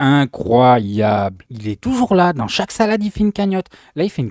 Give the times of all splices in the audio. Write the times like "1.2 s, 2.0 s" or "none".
1.5 s